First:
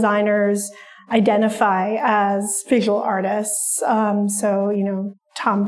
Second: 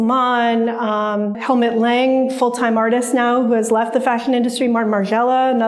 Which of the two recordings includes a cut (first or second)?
second